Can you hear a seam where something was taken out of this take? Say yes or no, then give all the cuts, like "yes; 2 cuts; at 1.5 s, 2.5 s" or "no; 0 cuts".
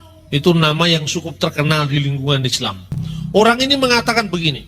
yes; 1 cut; at 2.9 s